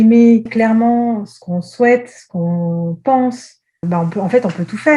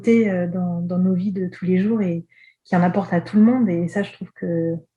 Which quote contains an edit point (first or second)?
first